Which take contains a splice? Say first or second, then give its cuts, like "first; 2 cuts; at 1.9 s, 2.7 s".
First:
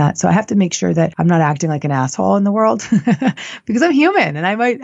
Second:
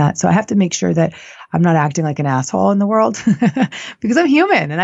first; 1 cut; at 1.1 s